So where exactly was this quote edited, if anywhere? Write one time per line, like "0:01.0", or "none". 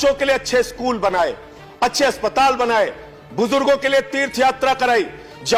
none